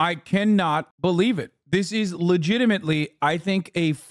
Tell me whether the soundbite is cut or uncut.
cut